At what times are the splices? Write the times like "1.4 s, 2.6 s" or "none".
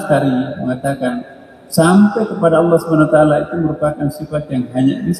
none